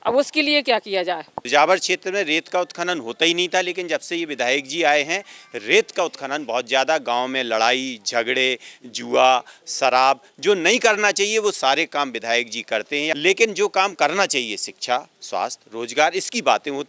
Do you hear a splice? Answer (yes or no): yes